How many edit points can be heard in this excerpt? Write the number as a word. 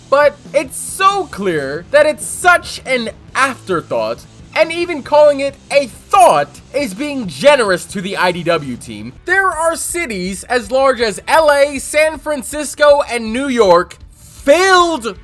one